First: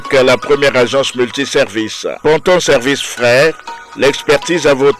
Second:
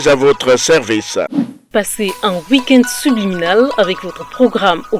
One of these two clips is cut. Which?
second; 1 cut; at 1.7 s

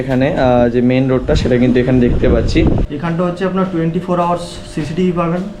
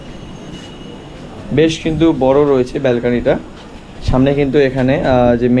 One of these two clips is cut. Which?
first; 1 cut; at 2.9 s

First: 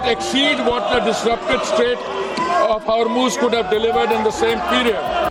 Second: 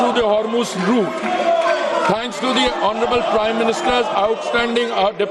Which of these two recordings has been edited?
second; 1 cut; at 2.4 s

